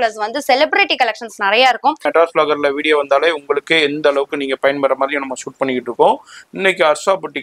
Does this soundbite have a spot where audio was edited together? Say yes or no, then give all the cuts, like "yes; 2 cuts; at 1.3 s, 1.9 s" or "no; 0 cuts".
yes; 1 cut; at 2.0 s